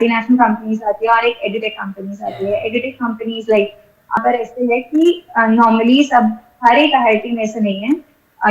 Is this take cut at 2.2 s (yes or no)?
no